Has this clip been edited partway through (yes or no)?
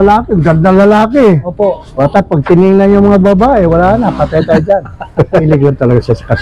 yes